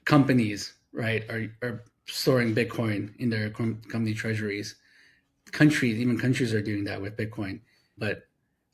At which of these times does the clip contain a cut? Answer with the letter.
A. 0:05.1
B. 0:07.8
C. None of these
B